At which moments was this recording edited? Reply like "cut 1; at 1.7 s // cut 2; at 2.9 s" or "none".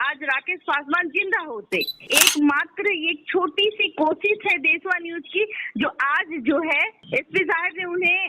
cut 1; at 2.0 s